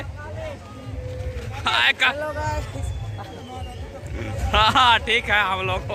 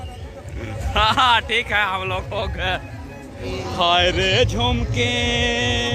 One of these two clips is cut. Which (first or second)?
second